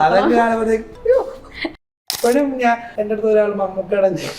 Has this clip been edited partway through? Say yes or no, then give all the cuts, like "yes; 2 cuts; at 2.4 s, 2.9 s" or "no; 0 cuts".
yes; 2 cuts; at 1.8 s, 2.9 s